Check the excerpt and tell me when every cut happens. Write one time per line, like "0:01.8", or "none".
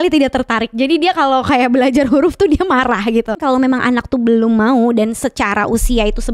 0:03.3